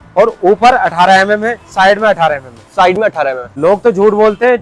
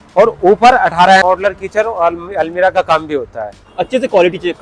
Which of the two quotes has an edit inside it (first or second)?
second